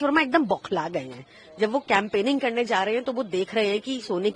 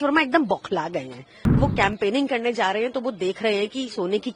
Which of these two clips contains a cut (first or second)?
second